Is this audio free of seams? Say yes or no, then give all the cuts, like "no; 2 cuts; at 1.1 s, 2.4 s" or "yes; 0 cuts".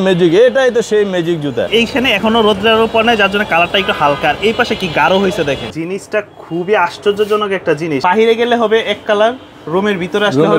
no; 3 cuts; at 1.7 s, 5.7 s, 8.0 s